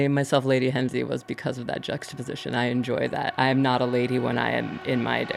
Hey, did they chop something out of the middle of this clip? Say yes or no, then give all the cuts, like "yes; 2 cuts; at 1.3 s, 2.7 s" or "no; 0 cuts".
no; 0 cuts